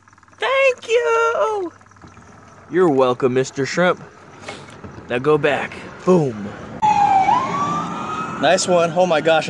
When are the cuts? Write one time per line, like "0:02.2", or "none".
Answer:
0:06.8

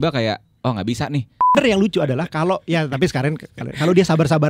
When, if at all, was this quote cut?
0:01.5

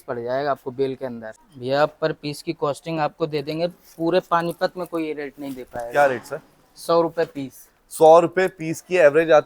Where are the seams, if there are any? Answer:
0:01.3

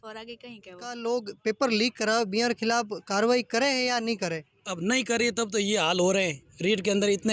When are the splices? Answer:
0:01.0

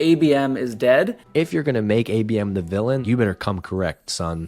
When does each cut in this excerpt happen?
0:01.2
0:03.0

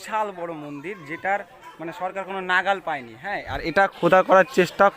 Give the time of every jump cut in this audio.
none

